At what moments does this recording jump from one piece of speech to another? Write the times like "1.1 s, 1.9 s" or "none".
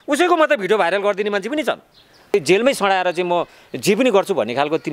2.3 s